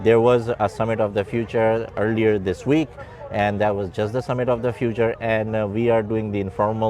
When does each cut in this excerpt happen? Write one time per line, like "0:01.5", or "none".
none